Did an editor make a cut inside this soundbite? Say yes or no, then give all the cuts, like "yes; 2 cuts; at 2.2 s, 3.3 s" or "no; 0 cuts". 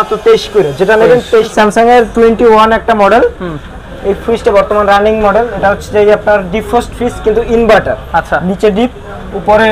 yes; 1 cut; at 1.5 s